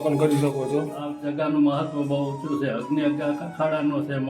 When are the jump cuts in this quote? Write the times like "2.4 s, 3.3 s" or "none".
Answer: 0.9 s